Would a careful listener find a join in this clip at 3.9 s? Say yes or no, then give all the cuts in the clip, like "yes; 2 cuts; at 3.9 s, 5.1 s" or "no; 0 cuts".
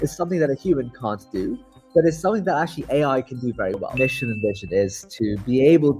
yes; 1 cut; at 3.9 s